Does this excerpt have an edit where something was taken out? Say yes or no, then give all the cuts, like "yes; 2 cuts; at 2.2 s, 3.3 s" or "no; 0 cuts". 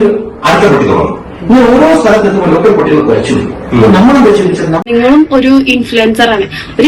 yes; 1 cut; at 4.8 s